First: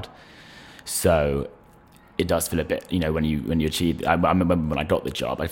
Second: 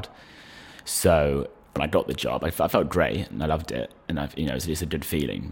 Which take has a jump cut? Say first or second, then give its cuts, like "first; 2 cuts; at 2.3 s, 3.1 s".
second; 1 cut; at 1.8 s